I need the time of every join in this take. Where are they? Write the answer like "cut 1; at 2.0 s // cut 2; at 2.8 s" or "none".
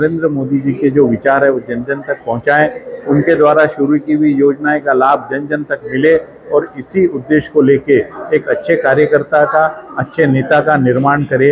none